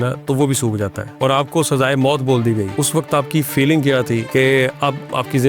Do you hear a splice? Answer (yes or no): yes